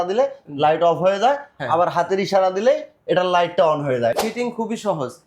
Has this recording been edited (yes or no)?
yes